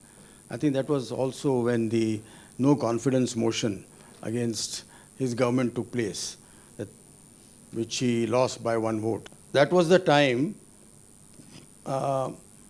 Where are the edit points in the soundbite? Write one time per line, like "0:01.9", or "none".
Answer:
0:09.3